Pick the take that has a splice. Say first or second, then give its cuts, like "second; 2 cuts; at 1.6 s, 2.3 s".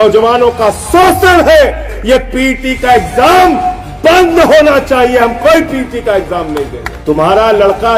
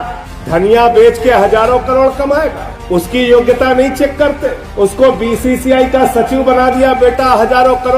first; 2 cuts; at 1.9 s, 6.9 s